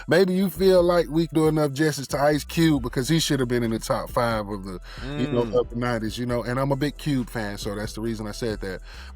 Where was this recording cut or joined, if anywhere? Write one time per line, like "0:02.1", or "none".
0:01.3